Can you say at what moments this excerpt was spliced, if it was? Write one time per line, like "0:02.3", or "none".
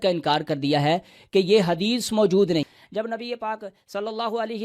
0:02.8